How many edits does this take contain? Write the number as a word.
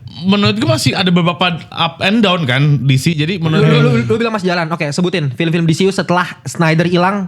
two